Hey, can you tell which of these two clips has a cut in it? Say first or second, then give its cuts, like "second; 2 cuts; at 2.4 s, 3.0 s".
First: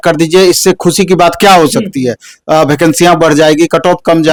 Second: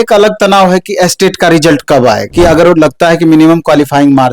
second; 1 cut; at 2.2 s